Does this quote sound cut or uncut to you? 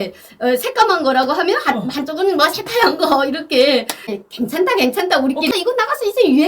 cut